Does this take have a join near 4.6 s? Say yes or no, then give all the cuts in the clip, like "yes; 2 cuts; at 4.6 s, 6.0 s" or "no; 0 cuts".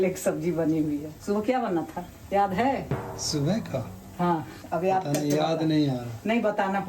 yes; 1 cut; at 4.6 s